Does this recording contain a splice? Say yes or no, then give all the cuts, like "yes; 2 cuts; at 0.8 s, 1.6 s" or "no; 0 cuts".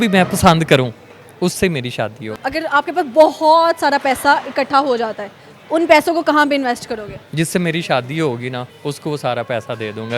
yes; 3 cuts; at 2.4 s, 7.2 s, 8.7 s